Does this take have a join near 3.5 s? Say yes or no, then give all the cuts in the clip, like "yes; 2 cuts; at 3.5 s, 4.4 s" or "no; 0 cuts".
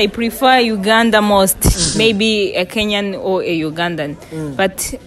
no; 1 cut; at 1.9 s